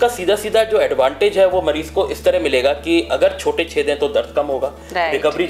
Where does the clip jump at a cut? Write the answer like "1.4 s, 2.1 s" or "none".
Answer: none